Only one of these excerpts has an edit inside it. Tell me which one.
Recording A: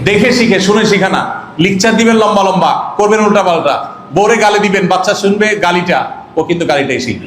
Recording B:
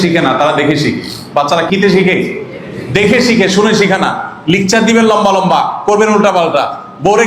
B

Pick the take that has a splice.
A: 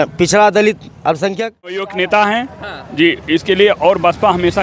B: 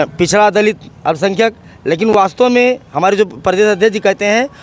A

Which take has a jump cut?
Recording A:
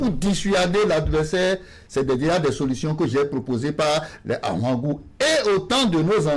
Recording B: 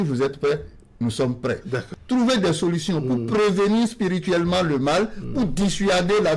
B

